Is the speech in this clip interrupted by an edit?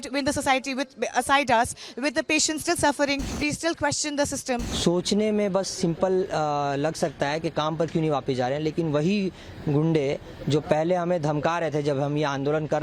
yes; 2 cuts; at 3.3 s, 4.7 s

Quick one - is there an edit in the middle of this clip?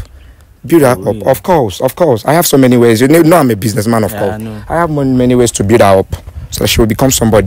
no; 0 cuts

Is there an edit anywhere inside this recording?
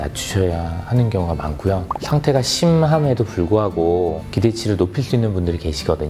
no; 0 cuts

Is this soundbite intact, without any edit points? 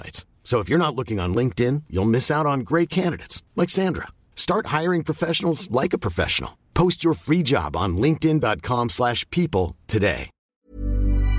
no; 1 cut; at 10.3 s

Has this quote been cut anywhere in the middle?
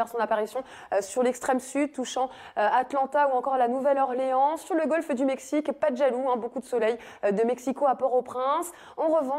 yes; 1 cut; at 6.7 s

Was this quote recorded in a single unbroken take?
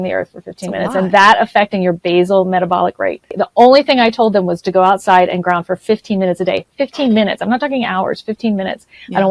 no; 1 cut; at 3.3 s

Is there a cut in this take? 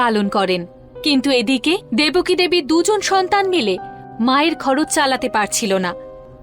no; 0 cuts

